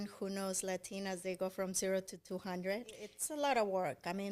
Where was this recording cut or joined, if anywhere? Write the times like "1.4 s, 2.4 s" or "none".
3.2 s